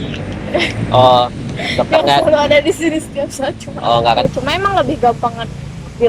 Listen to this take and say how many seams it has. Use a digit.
1